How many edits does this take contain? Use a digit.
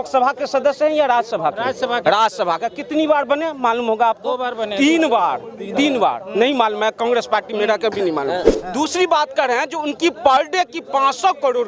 1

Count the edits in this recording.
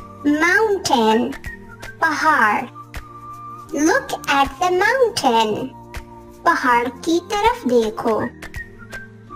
1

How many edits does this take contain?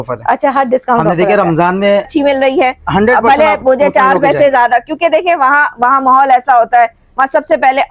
1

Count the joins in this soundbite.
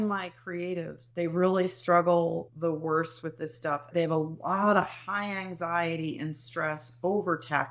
2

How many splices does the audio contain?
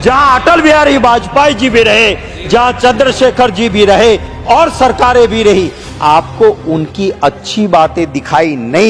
0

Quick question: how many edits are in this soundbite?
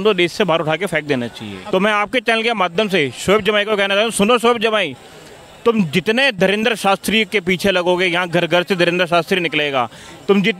1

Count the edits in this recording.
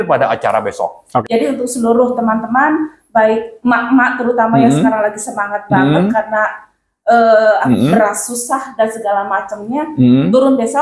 2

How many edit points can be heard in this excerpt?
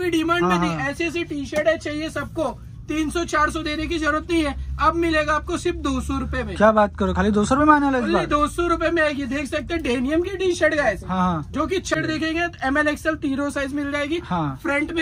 1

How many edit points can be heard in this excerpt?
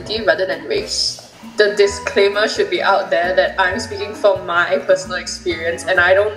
1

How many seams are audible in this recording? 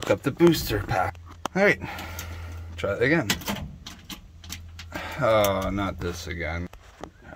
0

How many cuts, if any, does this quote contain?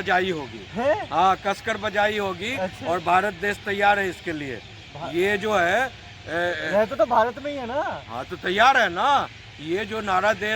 0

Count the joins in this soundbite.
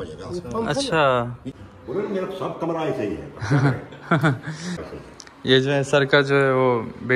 2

